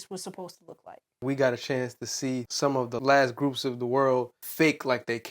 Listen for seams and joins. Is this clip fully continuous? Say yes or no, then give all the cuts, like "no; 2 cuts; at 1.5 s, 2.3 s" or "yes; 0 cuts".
no; 3 cuts; at 1.2 s, 2.8 s, 4.4 s